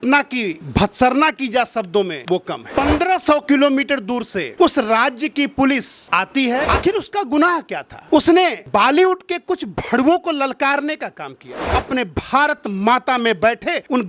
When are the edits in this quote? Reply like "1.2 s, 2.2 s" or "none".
2.6 s, 6.6 s, 11.6 s